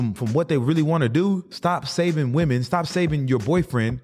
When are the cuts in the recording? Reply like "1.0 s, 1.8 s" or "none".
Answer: 1.5 s